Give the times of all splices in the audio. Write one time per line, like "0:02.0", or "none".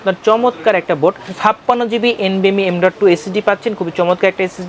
0:01.3